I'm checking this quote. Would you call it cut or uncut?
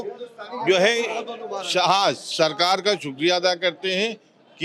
uncut